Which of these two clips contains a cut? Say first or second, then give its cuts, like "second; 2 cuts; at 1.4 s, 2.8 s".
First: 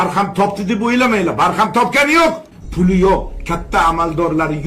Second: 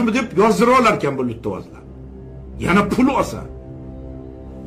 first; 1 cut; at 2.6 s